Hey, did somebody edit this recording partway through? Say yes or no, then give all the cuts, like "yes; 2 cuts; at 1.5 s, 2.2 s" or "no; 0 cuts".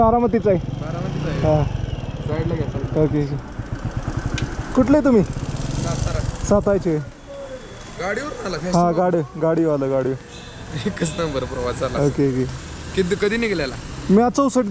no; 0 cuts